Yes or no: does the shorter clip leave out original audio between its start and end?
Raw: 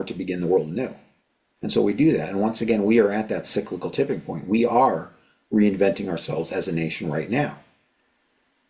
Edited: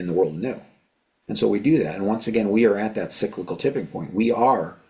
no